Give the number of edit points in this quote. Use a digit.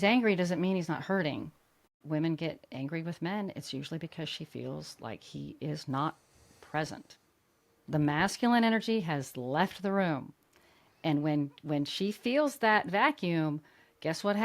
1